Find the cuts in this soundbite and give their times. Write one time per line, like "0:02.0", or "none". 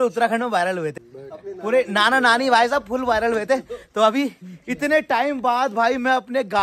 none